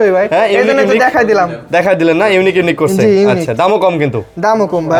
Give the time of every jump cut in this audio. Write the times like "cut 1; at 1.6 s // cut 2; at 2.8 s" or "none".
none